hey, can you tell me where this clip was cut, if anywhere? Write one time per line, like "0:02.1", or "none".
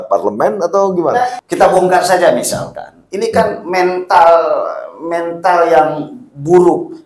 0:01.3